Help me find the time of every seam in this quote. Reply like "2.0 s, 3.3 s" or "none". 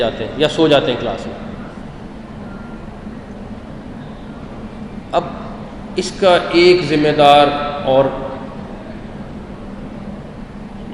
none